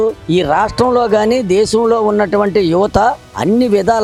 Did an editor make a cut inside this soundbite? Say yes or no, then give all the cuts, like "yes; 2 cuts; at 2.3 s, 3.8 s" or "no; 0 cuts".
no; 0 cuts